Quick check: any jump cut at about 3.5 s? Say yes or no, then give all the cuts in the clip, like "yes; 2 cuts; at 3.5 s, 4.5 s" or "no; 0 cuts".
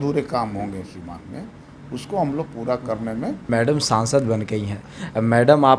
yes; 1 cut; at 3.5 s